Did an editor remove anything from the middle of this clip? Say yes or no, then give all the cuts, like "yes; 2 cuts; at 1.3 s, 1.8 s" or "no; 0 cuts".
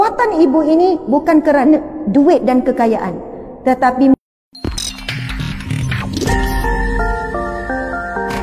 yes; 1 cut; at 4.1 s